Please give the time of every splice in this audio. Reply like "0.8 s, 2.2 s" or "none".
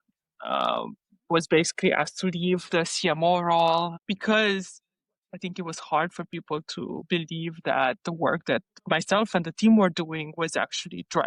3.9 s, 8.8 s